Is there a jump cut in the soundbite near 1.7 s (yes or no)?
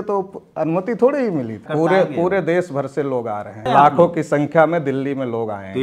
yes